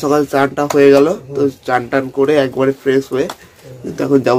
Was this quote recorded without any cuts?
yes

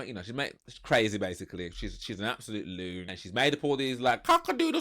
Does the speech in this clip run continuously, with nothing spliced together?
no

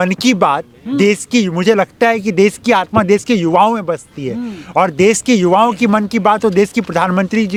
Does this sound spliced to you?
no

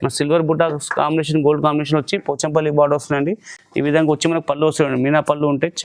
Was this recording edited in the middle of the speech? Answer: no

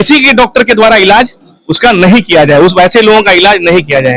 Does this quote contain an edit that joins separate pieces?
no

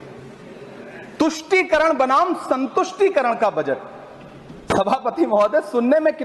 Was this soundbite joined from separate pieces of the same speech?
no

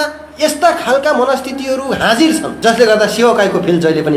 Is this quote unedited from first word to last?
no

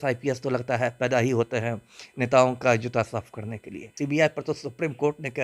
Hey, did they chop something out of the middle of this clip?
yes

